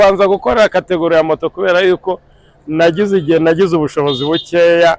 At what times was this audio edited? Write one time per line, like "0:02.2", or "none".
none